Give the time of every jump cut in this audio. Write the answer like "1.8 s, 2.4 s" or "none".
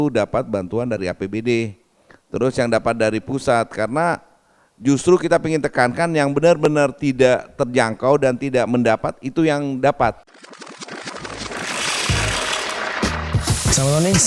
10.3 s